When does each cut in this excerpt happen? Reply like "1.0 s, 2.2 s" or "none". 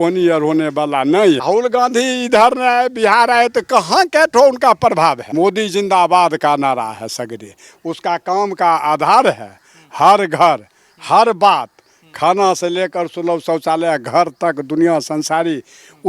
1.4 s, 5.2 s